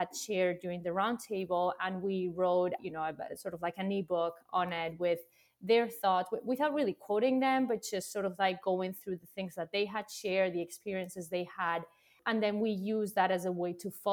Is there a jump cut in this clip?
yes; 1 cut; at 2.8 s

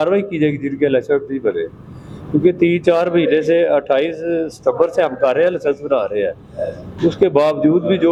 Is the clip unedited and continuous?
yes; 0 cuts

